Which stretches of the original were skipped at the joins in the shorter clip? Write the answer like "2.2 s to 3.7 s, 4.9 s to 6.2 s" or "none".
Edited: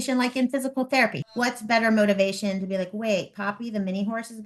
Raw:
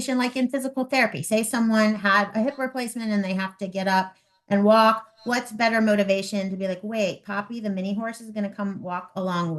1.2 s to 5.1 s

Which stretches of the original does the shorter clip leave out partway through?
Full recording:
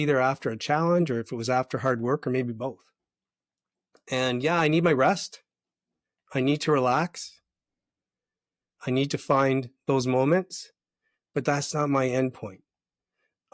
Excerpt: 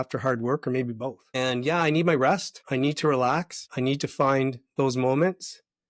2.8 s to 4.0 s, 5.3 s to 6.2 s, 7.2 s to 8.7 s

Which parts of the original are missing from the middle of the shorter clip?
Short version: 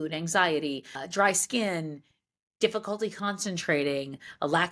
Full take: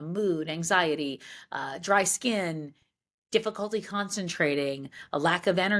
1.3 s to 1.7 s

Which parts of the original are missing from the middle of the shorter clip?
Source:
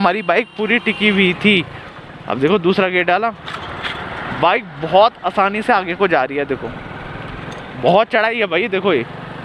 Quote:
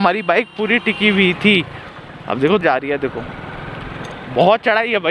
2.6 s to 6.1 s

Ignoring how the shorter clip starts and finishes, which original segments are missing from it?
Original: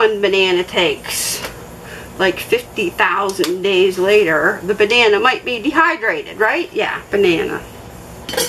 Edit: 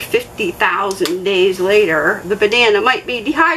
none

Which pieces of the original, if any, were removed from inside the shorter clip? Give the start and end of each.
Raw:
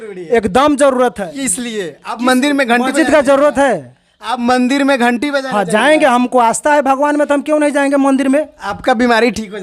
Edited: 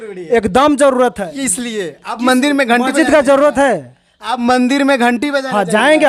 none

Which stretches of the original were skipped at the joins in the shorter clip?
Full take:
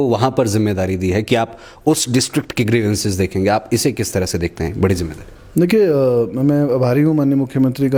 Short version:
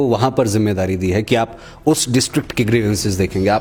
none

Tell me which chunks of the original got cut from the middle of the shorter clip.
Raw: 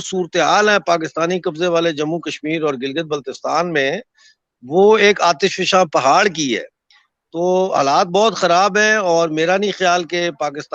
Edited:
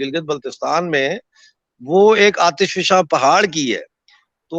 none

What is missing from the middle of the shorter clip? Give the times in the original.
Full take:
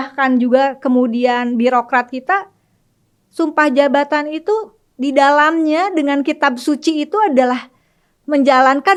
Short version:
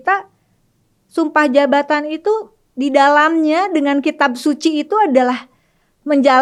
none

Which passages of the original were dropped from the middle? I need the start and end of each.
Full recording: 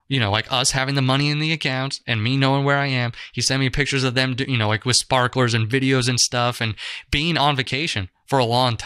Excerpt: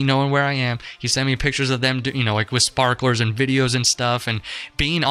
none

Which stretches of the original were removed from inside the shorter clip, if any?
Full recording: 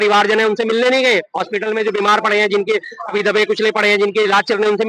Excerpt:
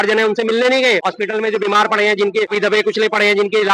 1.3 s to 1.4 s, 2.8 s to 3.1 s

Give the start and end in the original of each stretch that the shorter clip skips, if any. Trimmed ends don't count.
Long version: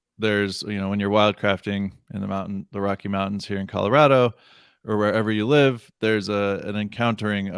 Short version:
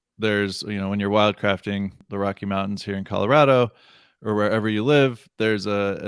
2.0 s to 2.6 s

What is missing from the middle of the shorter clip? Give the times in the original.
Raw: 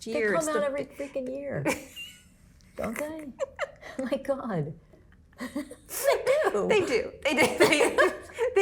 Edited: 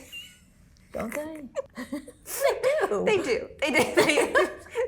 3.5 s to 5.3 s

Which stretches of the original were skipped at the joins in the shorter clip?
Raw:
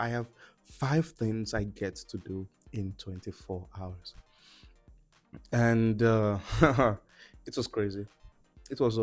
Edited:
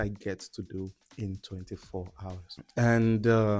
4.1 s to 5.3 s

